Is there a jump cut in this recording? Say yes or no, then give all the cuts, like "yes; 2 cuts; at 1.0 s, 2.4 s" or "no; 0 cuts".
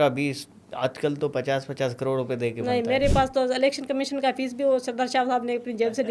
no; 0 cuts